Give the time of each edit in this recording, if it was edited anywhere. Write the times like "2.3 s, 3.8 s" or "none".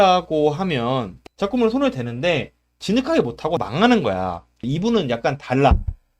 1.2 s, 4.6 s